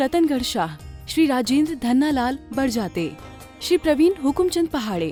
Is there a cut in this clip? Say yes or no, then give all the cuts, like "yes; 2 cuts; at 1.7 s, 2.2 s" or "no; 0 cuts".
no; 0 cuts